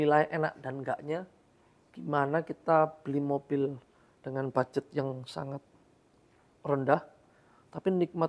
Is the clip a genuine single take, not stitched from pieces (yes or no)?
yes